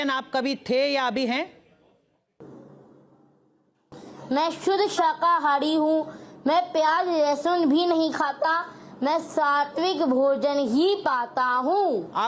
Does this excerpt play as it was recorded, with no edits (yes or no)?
yes